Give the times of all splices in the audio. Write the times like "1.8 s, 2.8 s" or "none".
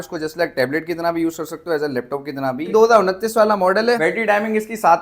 2.7 s, 4.0 s